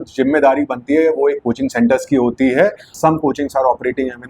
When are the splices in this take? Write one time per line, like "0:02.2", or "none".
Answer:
0:02.9